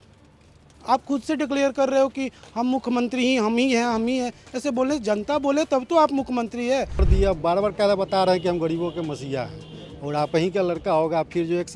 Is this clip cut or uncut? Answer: cut